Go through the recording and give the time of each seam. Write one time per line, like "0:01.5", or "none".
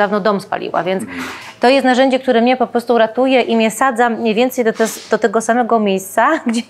none